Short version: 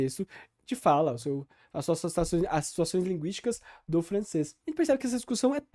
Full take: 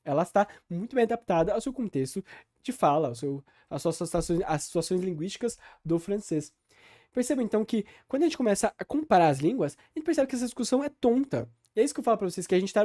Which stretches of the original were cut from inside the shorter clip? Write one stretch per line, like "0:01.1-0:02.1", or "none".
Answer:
0:06.6-0:09.9